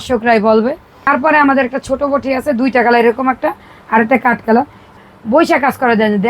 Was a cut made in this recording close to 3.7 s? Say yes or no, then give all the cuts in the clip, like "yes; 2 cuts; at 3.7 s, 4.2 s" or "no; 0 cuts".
no; 2 cuts; at 1.1 s, 5.0 s